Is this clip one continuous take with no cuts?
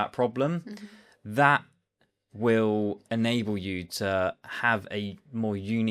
yes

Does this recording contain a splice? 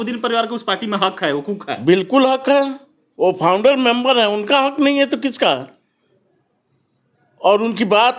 no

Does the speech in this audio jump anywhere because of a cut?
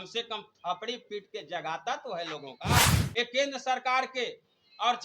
yes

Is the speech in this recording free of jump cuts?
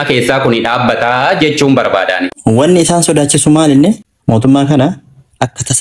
no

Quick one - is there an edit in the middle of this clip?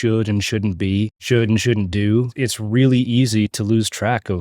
yes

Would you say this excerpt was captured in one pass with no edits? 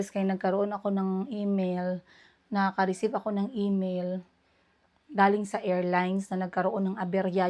yes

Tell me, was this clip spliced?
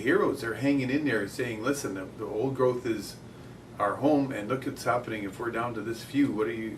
no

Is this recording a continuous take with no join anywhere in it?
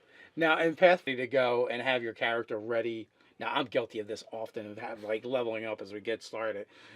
yes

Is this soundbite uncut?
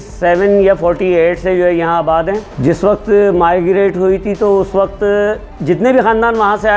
no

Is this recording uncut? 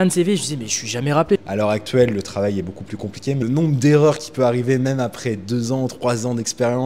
no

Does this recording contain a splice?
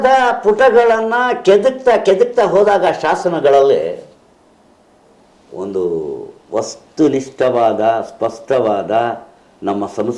no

